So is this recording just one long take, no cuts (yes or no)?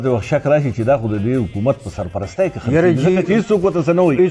yes